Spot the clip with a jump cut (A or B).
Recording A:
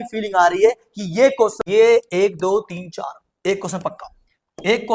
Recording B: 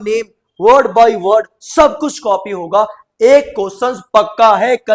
A